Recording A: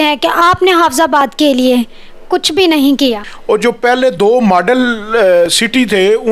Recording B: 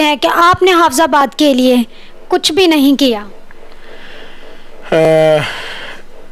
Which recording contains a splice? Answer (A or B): A